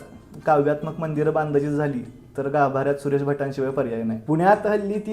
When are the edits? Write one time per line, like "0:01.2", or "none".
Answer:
0:04.2